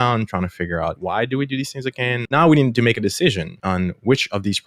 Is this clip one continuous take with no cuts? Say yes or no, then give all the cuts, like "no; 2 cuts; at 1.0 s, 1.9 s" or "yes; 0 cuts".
no; 3 cuts; at 1.0 s, 2.3 s, 3.5 s